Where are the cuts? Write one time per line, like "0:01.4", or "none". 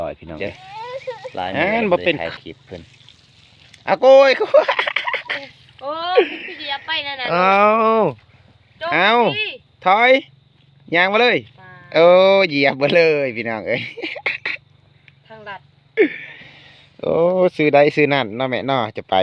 0:02.3